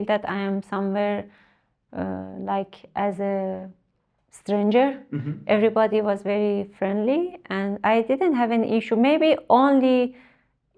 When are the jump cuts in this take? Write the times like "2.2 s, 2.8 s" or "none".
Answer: none